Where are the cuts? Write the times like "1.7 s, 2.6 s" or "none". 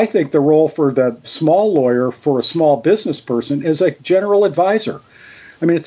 1.3 s, 4.0 s